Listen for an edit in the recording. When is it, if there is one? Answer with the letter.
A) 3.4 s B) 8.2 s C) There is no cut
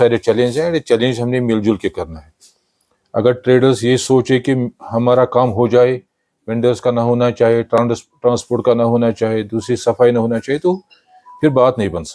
C